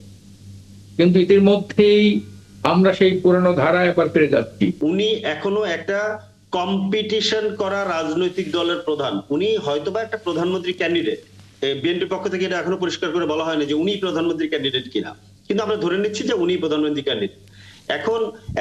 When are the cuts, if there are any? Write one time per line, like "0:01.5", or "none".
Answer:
0:04.8